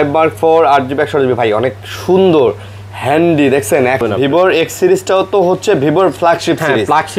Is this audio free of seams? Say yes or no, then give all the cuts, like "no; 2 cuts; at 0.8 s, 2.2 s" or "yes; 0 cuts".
no; 1 cut; at 4.0 s